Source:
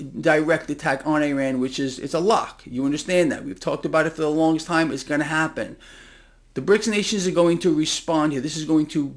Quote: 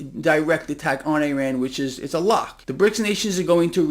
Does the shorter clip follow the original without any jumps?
no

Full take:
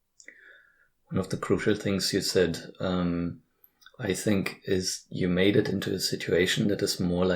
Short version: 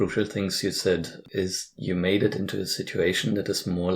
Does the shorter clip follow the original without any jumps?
no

